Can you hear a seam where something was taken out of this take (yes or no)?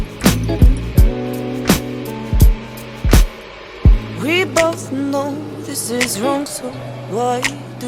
no